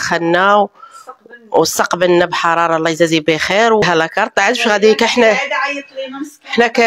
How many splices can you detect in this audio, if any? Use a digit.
1